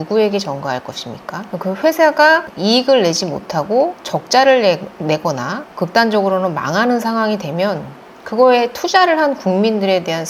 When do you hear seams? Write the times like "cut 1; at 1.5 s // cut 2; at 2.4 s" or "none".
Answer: cut 1; at 1.5 s